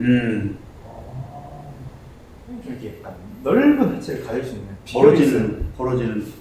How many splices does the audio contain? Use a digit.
1